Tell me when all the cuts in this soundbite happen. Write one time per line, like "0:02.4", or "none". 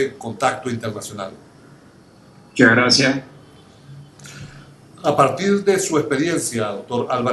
0:06.1

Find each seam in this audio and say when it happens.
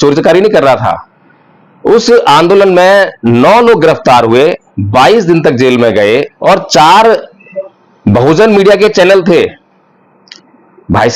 none

